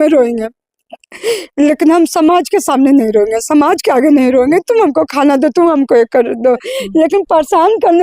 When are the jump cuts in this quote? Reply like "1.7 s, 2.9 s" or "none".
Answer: 6.8 s